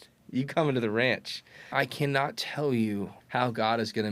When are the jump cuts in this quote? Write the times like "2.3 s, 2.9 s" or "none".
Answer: 1.7 s, 3.2 s